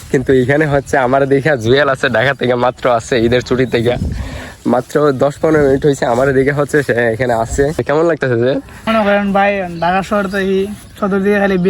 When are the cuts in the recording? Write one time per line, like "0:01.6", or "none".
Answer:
0:07.8
0:08.9